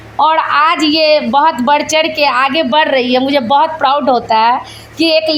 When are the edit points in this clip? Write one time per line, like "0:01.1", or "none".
none

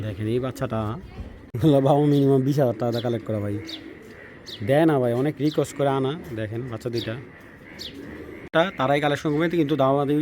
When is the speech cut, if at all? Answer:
0:01.4
0:08.5

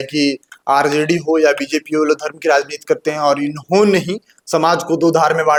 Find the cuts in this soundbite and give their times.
none

